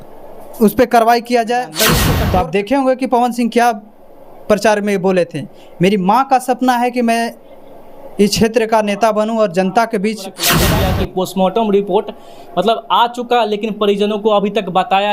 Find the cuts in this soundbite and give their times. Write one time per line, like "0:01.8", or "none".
0:02.0
0:10.6